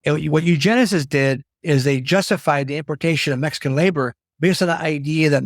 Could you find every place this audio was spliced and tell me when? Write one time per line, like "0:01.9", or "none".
0:01.5
0:04.2